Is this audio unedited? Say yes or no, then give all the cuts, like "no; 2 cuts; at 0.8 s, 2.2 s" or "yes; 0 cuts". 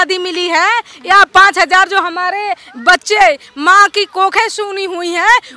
yes; 0 cuts